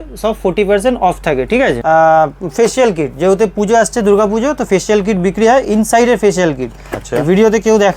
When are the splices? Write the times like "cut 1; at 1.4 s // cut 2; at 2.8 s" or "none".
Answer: cut 1; at 1.8 s